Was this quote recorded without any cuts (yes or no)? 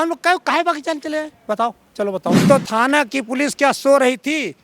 no